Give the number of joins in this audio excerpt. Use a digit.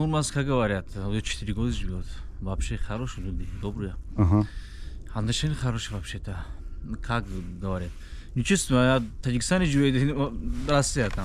0